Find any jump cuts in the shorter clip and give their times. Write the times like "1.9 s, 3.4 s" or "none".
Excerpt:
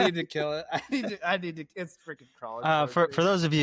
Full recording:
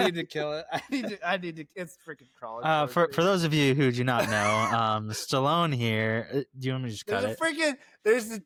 none